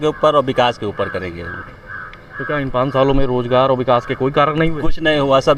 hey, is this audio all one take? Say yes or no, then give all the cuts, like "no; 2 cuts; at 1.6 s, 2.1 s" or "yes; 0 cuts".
yes; 0 cuts